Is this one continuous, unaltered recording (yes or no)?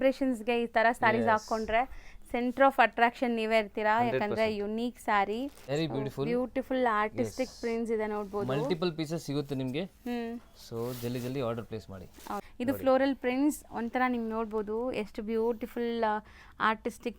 no